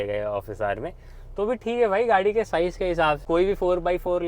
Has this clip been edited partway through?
yes; 1 cut; at 3.2 s

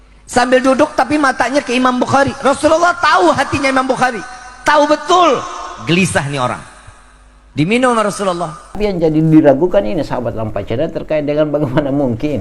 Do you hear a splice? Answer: yes; 1 cut; at 8.8 s

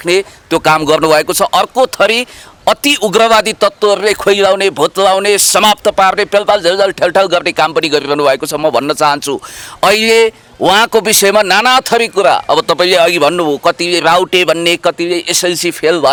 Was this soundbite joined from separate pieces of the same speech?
no; 0 cuts

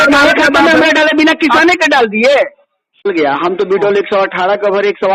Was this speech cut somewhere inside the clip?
yes; 1 cut; at 3.1 s

